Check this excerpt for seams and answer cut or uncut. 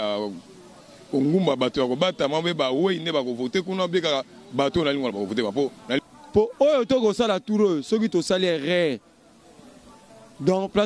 cut